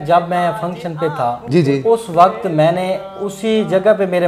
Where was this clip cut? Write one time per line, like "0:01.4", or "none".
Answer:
none